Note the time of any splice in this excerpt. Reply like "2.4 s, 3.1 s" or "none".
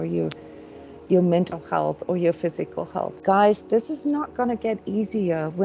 3.1 s